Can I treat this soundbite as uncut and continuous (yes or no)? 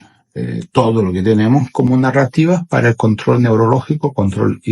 yes